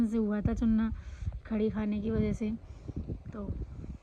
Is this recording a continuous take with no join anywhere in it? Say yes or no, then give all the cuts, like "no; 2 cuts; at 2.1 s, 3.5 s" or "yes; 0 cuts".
yes; 0 cuts